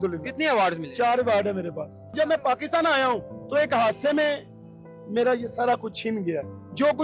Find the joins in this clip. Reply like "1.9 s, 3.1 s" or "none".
2.1 s